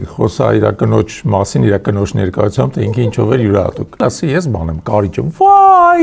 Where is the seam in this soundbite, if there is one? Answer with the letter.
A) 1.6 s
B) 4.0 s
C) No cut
B